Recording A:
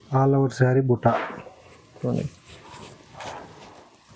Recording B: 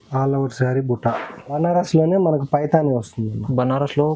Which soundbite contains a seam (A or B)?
B